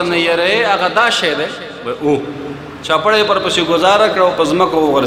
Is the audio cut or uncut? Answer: uncut